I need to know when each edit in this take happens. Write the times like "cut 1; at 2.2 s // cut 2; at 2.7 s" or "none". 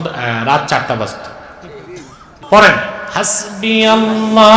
cut 1; at 2.3 s